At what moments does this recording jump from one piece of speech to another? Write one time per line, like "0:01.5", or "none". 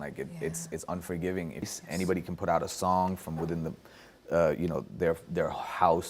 0:01.7